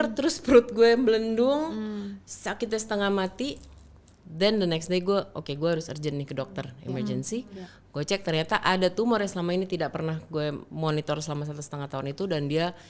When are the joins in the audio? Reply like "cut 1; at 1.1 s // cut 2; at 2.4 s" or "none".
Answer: none